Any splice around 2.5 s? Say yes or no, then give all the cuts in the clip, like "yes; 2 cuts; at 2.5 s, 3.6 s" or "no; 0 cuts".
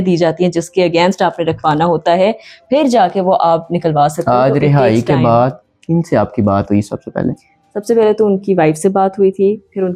no; 0 cuts